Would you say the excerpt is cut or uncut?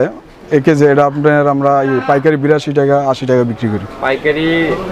uncut